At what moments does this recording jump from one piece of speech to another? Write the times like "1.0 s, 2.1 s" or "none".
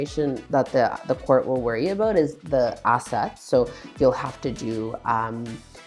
none